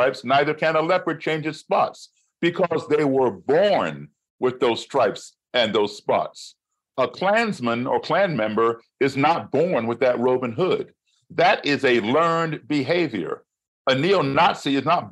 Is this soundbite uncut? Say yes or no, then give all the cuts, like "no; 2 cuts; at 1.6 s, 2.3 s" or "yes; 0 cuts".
yes; 0 cuts